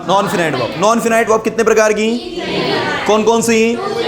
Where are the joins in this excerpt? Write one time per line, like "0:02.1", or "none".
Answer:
0:01.3

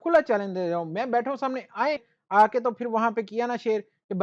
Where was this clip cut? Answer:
0:02.2

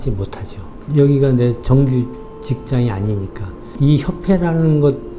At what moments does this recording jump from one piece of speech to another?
none

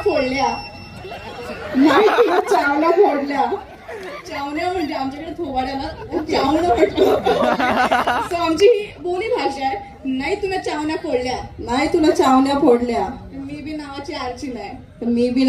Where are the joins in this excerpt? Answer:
none

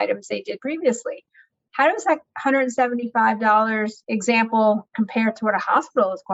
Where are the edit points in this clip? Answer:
0:04.0
0:04.9

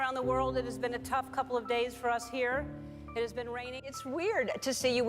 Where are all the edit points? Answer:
0:04.0

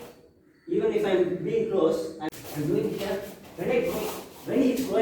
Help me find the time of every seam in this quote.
0:02.2

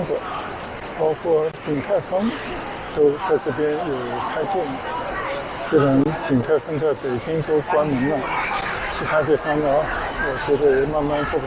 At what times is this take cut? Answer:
none

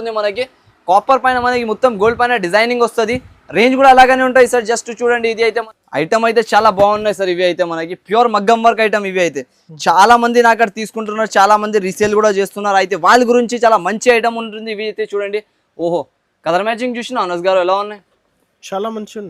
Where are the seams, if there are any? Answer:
0:05.7

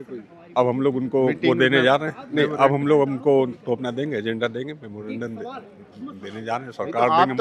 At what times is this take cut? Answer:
none

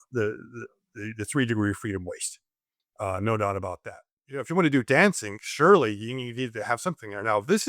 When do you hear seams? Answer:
0:04.4

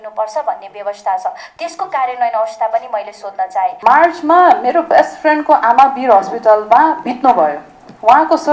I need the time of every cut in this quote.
0:03.8

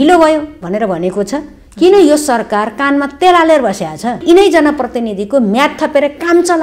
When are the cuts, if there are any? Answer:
0:04.2

